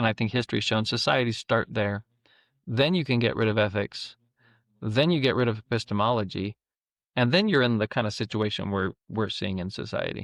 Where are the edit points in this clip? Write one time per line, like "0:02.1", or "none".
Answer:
none